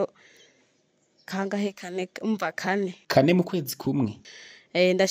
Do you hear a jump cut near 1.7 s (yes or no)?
no